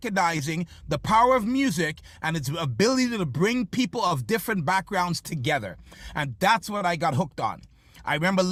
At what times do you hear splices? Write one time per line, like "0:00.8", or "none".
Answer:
none